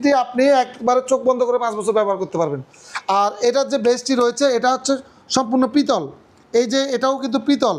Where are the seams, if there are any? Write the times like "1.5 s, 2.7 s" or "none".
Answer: none